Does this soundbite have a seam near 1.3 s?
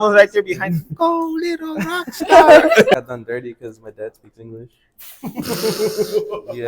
no; 1 cut; at 3.0 s

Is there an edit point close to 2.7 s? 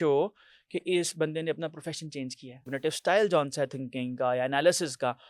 yes; 1 cut; at 2.7 s

